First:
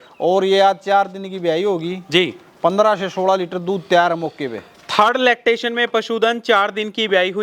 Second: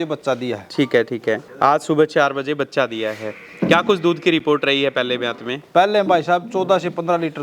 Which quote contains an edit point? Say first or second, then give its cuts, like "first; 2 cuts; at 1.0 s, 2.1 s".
second; 1 cut; at 1.5 s